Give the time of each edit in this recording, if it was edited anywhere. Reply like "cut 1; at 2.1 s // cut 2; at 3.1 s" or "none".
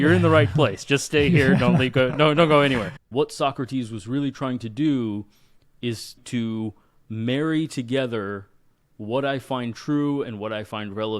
cut 1; at 3.0 s // cut 2; at 6.2 s